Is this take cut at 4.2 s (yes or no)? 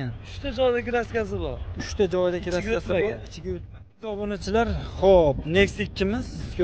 yes